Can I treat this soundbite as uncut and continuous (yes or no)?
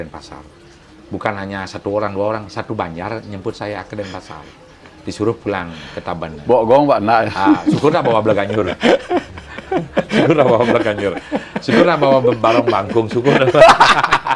yes